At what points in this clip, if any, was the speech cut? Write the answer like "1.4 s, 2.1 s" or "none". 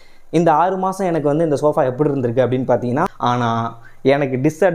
3.1 s